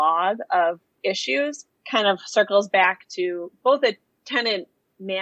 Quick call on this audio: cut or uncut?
cut